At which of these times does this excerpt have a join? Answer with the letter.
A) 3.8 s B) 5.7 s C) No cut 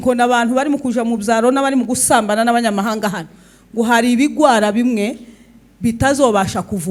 C